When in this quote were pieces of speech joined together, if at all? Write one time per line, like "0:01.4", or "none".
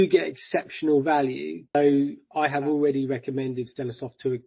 0:01.7

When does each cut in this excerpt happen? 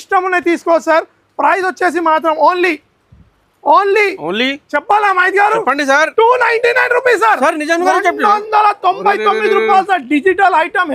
none

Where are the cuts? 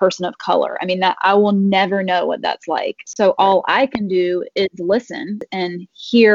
0:05.4

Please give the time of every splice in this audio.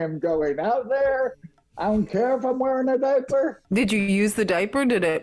0:03.6

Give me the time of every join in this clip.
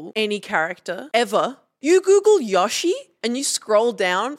0:01.0
0:01.7
0:03.1

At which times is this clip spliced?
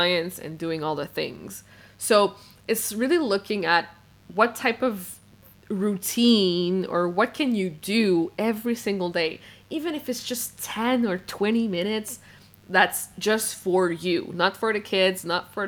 none

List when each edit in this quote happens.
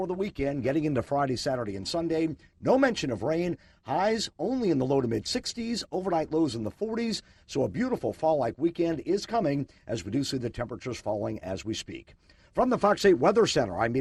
none

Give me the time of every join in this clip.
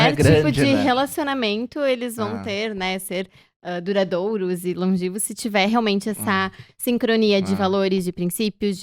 none

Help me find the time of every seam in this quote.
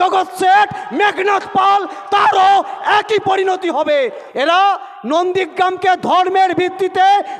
0:04.2

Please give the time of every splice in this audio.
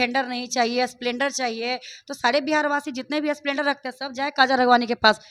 none

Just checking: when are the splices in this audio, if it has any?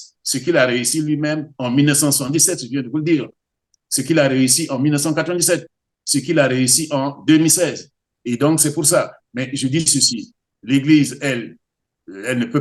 0:08.1

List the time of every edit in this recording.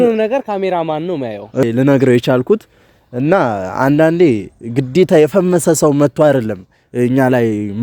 0:01.6

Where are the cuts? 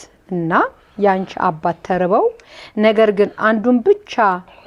none

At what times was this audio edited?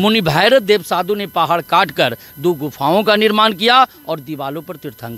none

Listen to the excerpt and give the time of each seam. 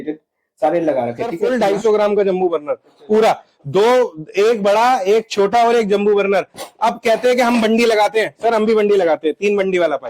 0:01.5

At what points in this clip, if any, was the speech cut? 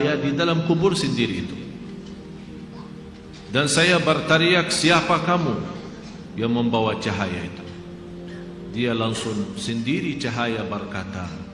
0:01.5
0:03.4

